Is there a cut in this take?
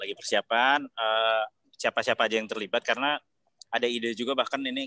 yes; 1 cut; at 1.6 s

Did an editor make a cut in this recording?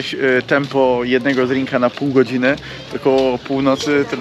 no; 0 cuts

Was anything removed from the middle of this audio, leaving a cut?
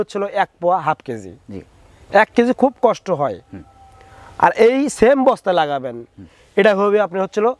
no; 0 cuts

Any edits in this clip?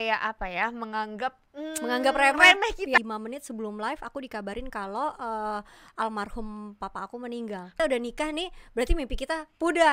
yes; 2 cuts; at 3.0 s, 7.7 s

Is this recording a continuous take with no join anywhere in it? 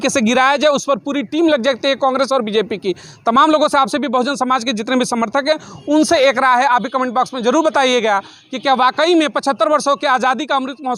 yes; 0 cuts

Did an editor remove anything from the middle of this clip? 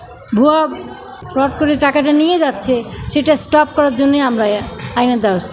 yes; 1 cut; at 1.1 s

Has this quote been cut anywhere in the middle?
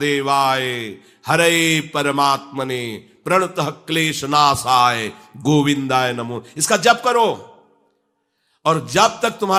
no; 0 cuts

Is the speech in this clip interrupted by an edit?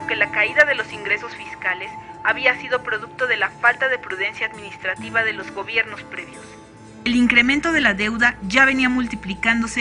yes; 1 cut; at 1.1 s

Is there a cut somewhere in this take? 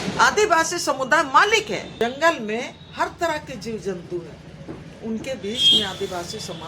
yes; 1 cut; at 2.0 s

